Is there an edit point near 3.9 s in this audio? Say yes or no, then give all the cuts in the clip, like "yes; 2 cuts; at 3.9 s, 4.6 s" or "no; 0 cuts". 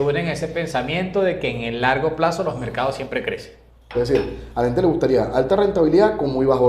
yes; 1 cut; at 3.9 s